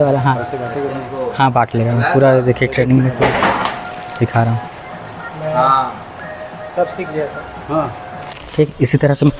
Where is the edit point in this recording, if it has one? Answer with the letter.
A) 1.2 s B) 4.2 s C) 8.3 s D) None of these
C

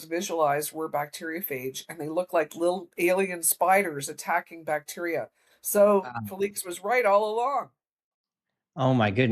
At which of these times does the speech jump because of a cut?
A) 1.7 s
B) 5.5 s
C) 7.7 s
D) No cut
D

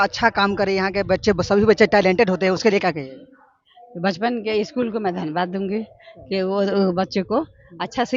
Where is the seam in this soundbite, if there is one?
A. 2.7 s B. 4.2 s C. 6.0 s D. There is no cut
D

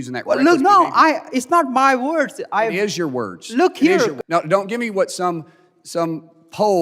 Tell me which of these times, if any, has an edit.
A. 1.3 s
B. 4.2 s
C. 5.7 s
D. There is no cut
B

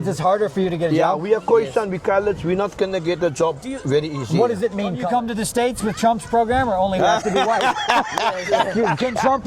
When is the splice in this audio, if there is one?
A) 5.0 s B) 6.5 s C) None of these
A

